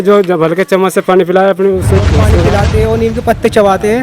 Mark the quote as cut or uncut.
cut